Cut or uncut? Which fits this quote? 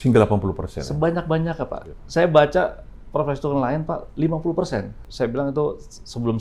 cut